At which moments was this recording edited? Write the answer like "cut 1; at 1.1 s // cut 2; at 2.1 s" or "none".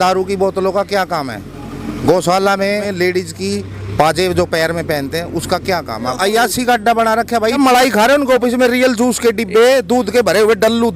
cut 1; at 2.9 s // cut 2; at 6.1 s // cut 3; at 7.6 s